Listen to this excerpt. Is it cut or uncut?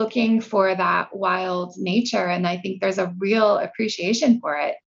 uncut